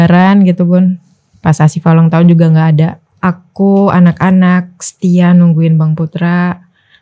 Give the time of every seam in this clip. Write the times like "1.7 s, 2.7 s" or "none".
3.0 s